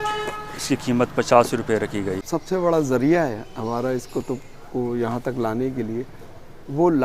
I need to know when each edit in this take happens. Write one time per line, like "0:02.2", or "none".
0:02.2